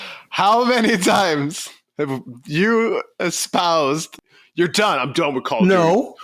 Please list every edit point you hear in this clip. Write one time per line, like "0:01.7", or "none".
0:04.2